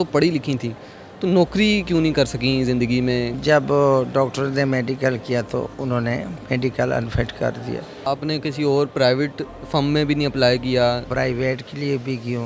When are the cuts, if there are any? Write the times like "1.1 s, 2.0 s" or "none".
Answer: 3.3 s, 7.9 s, 11.1 s